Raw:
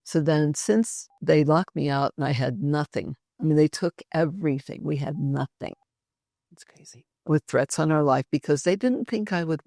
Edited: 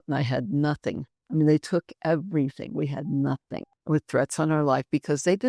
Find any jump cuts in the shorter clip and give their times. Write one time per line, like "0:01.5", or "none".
0:03.7